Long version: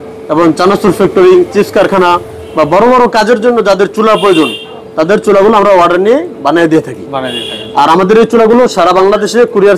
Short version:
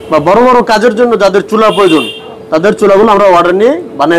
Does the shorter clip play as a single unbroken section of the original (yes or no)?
yes